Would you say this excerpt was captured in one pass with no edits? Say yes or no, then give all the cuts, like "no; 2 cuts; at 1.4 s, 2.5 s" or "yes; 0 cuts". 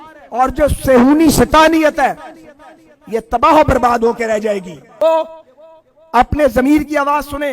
no; 1 cut; at 5.0 s